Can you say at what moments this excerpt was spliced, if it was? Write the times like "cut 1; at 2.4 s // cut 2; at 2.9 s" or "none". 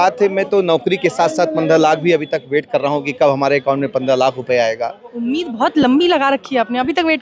none